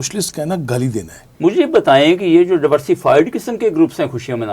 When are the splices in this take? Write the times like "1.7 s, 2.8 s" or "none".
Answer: 1.2 s